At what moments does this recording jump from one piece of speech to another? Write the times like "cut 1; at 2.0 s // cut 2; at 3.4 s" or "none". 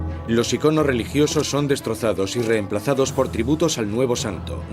cut 1; at 2.7 s